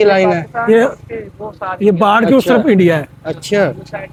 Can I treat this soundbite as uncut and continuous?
yes; 0 cuts

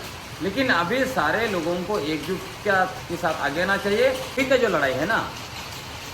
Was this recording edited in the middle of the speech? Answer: yes; 1 cut; at 4.3 s

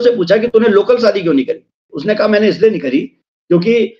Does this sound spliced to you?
yes; 1 cut; at 1.9 s

